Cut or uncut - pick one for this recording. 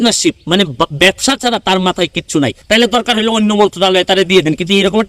cut